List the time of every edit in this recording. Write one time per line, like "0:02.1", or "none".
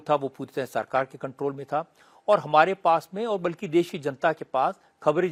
none